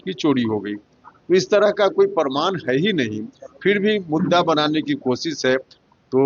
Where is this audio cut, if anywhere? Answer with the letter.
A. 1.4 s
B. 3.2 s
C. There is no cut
C